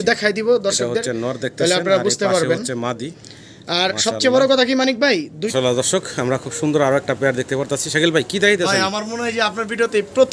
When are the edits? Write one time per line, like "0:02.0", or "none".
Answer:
0:05.4